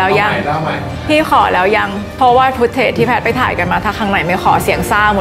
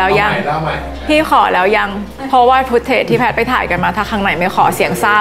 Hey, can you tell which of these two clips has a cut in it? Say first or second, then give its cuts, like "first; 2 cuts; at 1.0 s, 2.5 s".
first; 1 cut; at 2.0 s